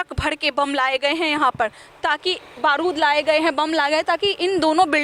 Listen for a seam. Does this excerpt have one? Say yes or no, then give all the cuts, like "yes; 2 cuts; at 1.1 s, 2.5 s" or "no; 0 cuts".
no; 0 cuts